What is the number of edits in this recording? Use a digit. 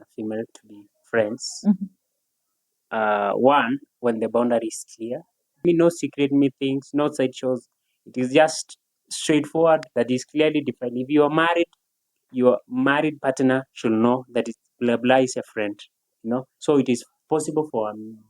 3